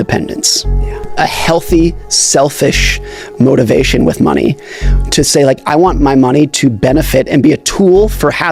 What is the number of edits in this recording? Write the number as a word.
one